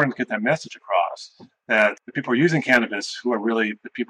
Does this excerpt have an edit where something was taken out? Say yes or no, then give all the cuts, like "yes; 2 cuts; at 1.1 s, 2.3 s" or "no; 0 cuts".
yes; 1 cut; at 2.0 s